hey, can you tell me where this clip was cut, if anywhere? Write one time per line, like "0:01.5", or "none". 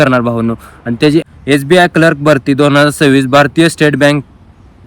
0:01.3